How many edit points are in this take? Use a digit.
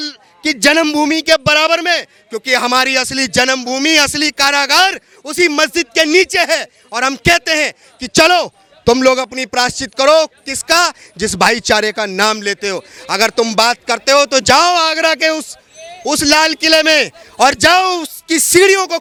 0